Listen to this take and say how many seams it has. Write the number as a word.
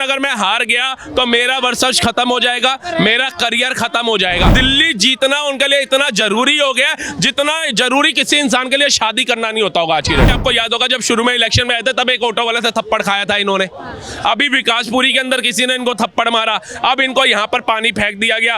two